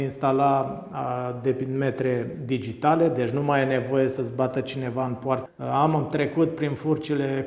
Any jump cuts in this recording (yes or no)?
yes